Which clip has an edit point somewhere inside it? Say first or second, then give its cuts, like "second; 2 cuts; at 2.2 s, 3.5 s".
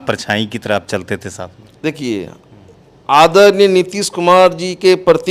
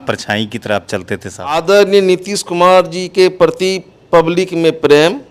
second; 1 cut; at 1.5 s